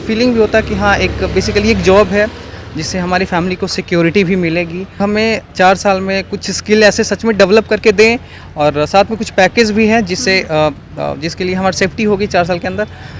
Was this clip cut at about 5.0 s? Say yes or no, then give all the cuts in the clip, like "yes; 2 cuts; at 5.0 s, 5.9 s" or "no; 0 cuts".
yes; 1 cut; at 5.0 s